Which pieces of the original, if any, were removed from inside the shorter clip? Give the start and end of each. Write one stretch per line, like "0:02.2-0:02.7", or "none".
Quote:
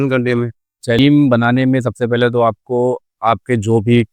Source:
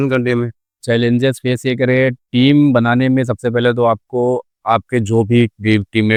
0:01.0-0:02.4